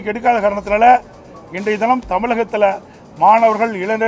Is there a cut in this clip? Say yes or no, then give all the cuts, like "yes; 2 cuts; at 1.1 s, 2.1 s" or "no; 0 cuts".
no; 0 cuts